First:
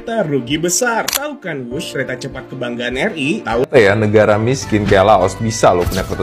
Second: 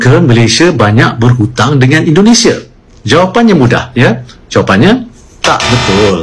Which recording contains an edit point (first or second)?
first